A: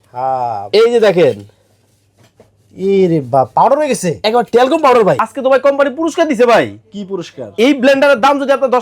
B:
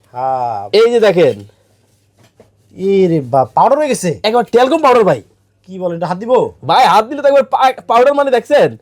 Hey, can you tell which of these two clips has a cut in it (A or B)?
A